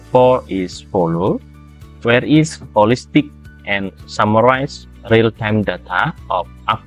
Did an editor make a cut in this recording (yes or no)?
no